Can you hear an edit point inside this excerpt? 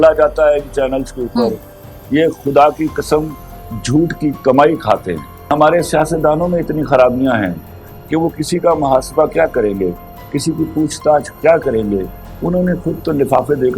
yes; 1 cut; at 5.5 s

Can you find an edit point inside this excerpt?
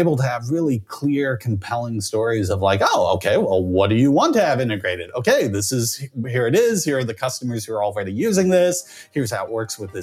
no; 0 cuts

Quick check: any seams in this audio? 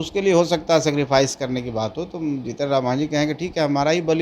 no; 0 cuts

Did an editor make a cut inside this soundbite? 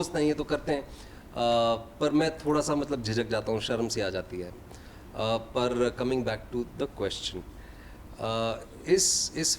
no; 0 cuts

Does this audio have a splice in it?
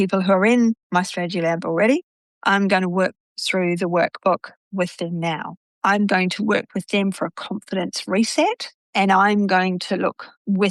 no; 0 cuts

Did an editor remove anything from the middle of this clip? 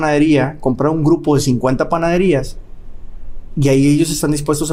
no; 0 cuts

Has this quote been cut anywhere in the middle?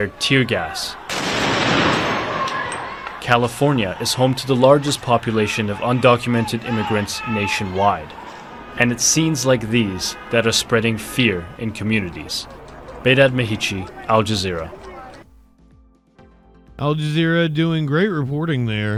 no; 0 cuts

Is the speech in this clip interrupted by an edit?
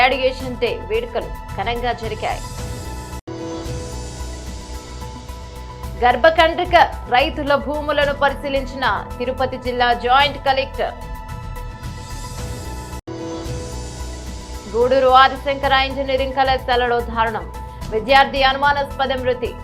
yes; 2 cuts; at 11.2 s, 13.0 s

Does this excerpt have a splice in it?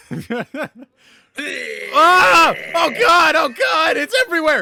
no; 0 cuts

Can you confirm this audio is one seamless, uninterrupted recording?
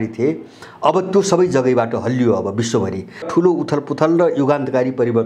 no; 1 cut; at 3.3 s

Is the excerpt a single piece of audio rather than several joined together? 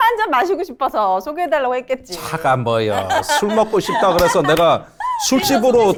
yes; 0 cuts

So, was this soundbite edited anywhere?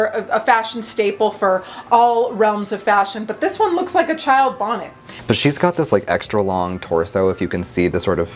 yes; 1 cut; at 5.1 s

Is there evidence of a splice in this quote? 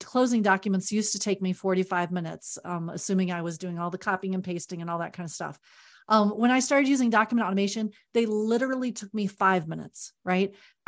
no; 0 cuts

